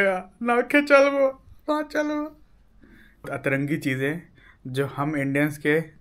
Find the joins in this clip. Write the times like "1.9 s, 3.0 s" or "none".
3.3 s